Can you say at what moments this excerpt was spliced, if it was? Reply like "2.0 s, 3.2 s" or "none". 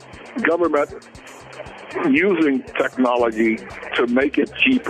none